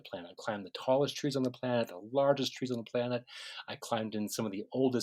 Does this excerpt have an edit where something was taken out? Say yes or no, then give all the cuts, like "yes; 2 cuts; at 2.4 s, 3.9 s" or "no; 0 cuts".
no; 0 cuts